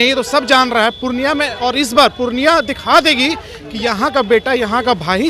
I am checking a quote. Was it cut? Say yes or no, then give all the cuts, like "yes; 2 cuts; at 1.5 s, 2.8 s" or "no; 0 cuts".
no; 0 cuts